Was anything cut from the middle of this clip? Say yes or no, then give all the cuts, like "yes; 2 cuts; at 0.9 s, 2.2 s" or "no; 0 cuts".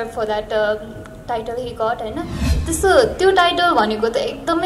yes; 1 cut; at 2.5 s